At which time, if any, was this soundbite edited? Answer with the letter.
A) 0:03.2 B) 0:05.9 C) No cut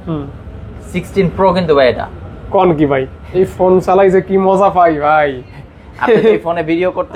A